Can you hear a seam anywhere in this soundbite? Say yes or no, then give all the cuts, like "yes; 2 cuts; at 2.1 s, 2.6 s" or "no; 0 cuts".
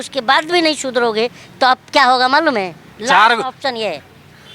yes; 1 cut; at 2.8 s